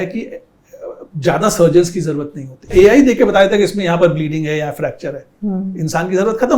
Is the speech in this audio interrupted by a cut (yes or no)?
yes